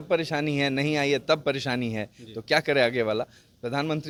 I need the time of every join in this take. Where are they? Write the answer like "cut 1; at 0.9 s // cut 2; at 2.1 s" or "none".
none